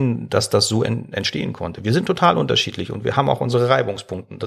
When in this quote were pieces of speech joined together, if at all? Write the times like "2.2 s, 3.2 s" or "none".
none